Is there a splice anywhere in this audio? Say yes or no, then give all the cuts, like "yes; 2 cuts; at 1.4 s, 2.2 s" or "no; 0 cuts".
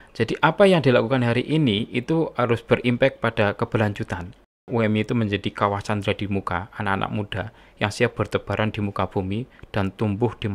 yes; 1 cut; at 4.7 s